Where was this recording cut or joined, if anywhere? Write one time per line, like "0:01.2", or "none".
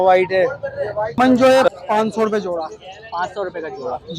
0:01.2